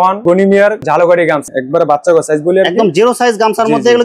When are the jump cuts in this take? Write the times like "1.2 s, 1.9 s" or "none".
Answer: 1.5 s